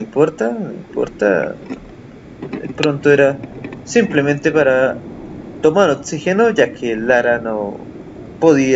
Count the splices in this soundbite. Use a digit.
1